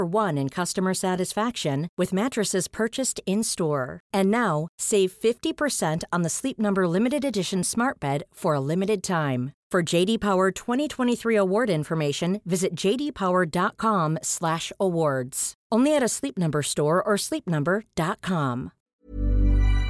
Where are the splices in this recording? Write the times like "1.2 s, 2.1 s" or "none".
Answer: 18.8 s